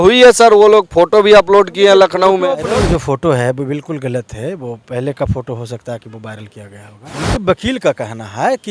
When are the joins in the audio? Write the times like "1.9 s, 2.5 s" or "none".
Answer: 2.7 s, 7.2 s

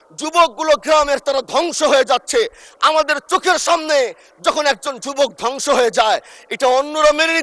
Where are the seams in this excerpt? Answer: none

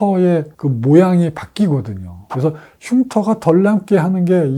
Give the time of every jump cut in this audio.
none

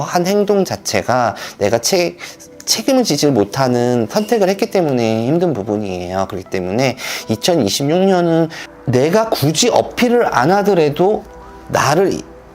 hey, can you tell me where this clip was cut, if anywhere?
8.6 s

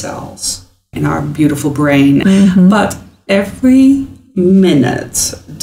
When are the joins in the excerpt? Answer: 0.9 s, 2.2 s

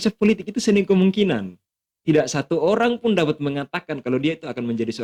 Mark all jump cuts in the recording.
none

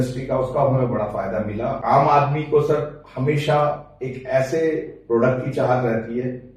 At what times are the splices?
1.8 s

